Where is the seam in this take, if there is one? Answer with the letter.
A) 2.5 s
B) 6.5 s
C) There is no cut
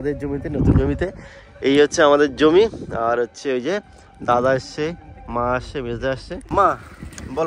B